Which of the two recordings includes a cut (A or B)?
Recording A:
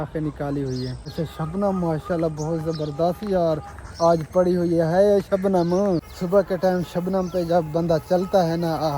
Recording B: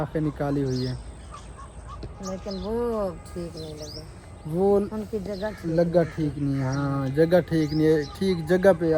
A